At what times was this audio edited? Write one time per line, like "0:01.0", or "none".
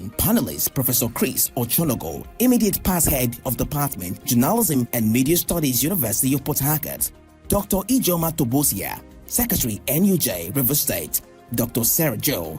0:04.7